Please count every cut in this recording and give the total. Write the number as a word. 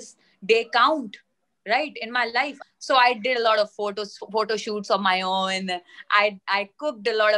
one